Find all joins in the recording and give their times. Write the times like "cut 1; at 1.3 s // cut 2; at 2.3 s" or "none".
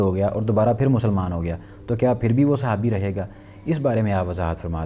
none